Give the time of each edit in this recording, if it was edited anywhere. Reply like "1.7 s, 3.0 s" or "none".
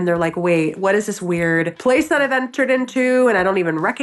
1.7 s